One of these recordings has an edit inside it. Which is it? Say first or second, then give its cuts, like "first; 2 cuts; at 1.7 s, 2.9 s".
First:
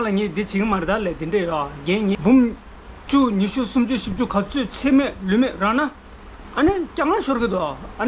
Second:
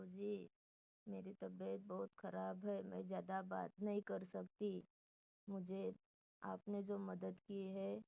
first; 1 cut; at 2.2 s